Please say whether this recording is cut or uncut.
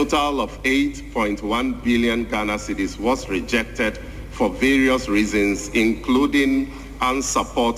uncut